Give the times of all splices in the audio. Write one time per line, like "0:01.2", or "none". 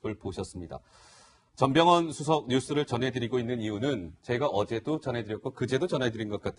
0:05.2